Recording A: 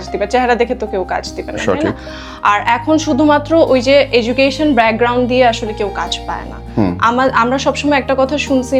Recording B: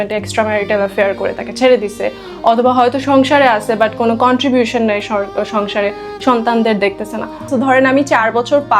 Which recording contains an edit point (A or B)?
B